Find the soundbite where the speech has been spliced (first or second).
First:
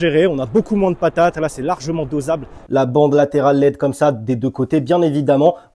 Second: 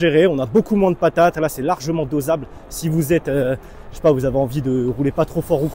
first